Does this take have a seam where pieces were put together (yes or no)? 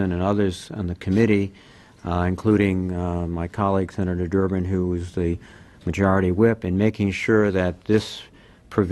no